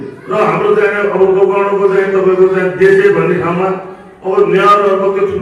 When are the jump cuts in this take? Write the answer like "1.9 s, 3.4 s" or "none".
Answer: none

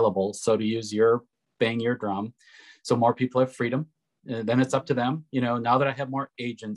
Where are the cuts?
1.4 s

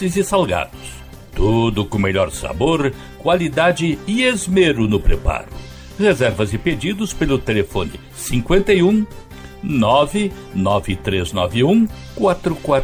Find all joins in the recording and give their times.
none

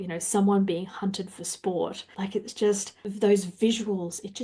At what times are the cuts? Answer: 2.0 s, 3.1 s

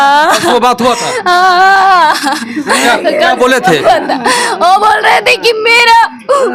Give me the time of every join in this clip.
none

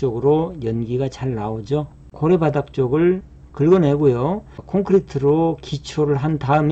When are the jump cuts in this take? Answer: 2.0 s, 4.5 s

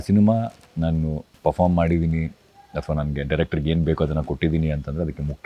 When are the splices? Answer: 1.2 s

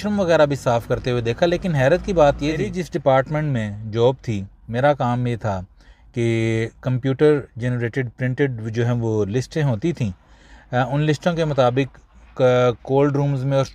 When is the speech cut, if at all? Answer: 2.8 s

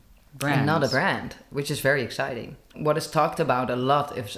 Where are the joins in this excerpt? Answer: 2.7 s

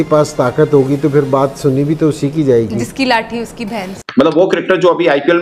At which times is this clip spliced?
3.9 s

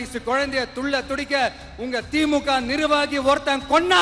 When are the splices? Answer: none

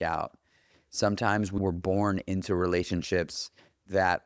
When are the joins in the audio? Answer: 1.5 s

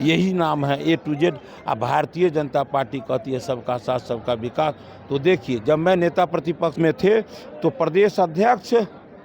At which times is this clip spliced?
6.7 s

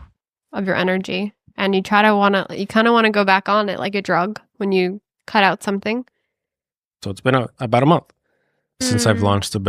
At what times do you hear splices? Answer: 7.0 s, 8.8 s

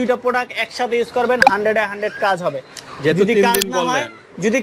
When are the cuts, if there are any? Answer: none

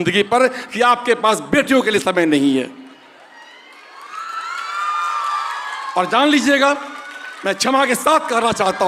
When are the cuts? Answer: none

